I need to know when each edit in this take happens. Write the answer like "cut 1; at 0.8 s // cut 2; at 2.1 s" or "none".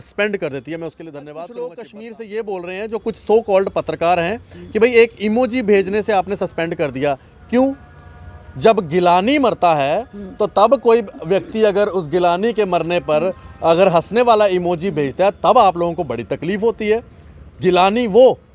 cut 1; at 1.3 s